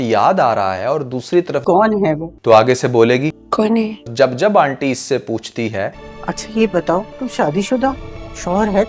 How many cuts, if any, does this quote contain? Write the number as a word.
two